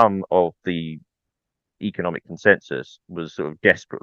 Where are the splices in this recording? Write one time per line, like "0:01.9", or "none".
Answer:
none